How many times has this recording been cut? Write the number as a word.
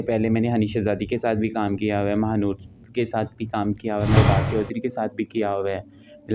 one